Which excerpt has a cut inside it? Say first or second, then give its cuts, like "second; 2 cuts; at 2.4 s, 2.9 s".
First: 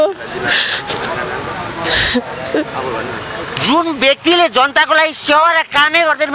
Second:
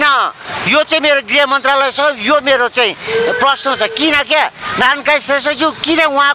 first; 1 cut; at 3.5 s